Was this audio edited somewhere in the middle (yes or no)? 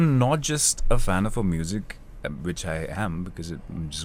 no